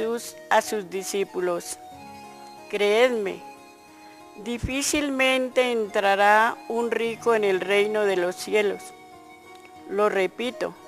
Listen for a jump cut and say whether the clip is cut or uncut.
cut